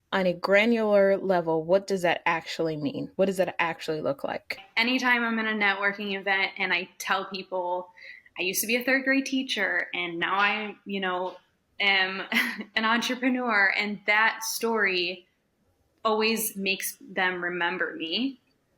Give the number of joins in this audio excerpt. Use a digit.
1